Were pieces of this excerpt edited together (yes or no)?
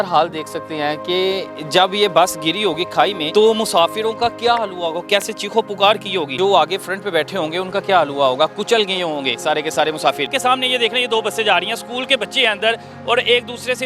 yes